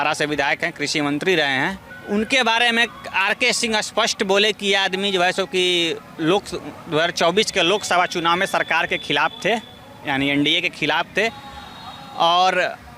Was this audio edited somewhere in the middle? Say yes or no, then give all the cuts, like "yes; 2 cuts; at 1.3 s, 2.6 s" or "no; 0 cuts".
yes; 1 cut; at 1.9 s